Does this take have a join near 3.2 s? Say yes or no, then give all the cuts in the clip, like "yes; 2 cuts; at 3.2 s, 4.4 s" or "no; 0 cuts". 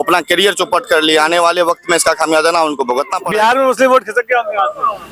yes; 1 cut; at 3.2 s